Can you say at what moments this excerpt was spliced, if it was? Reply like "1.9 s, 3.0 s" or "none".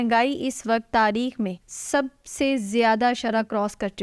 1.7 s